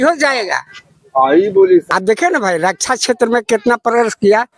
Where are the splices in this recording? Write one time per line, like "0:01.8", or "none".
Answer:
0:01.9